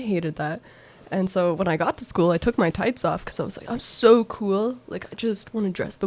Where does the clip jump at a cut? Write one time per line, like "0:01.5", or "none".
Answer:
none